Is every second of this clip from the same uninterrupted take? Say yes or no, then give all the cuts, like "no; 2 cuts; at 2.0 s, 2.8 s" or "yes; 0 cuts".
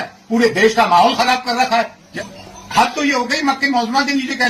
no; 1 cut; at 2.1 s